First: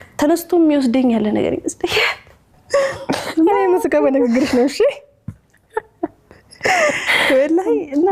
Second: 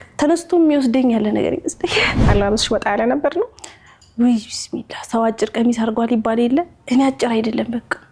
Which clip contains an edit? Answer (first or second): second